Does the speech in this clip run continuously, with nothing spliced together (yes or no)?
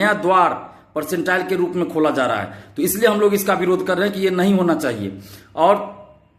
yes